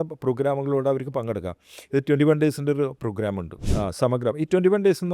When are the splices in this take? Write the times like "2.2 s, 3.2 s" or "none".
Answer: 3.6 s